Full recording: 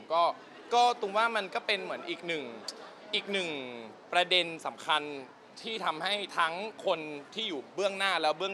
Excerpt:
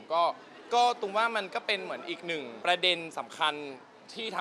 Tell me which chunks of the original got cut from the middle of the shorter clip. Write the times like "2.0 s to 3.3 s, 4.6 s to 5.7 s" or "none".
2.5 s to 4.0 s